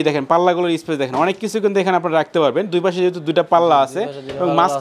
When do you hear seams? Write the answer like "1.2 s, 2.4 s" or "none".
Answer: none

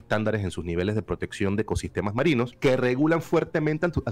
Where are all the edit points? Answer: 2.5 s

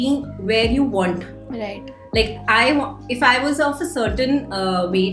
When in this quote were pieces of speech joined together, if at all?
none

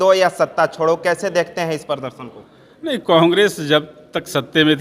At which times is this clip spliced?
none

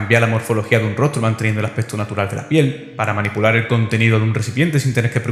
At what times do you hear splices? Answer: none

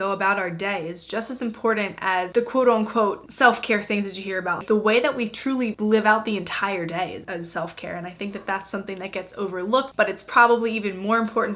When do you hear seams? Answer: 2.3 s, 4.6 s, 7.2 s, 9.9 s

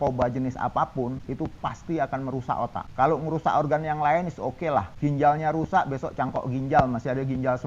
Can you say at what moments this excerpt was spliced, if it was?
1.2 s, 2.8 s, 4.9 s

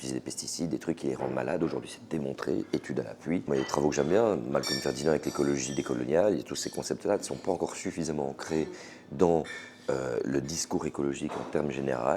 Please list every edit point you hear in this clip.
none

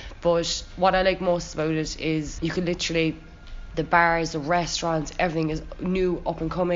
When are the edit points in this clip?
none

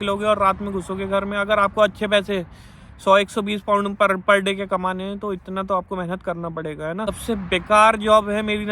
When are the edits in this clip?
7.1 s

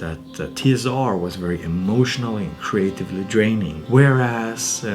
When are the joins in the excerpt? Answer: 3.8 s

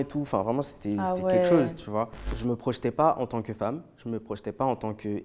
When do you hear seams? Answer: 2.3 s

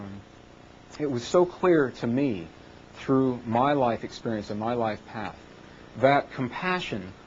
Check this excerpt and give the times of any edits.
2.5 s

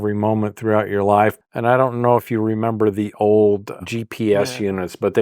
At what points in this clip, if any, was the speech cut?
1.4 s, 3.8 s

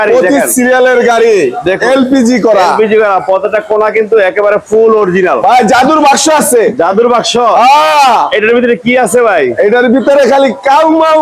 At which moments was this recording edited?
none

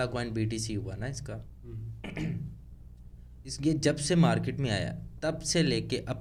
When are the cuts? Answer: none

